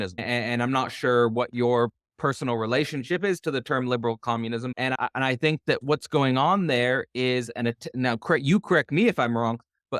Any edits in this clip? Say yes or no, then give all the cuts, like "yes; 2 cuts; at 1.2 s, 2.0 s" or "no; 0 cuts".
no; 0 cuts